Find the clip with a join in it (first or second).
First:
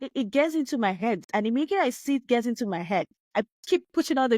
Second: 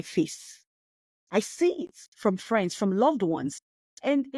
first